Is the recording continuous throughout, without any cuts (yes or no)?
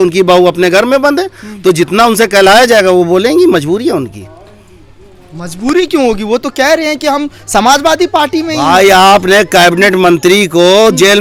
yes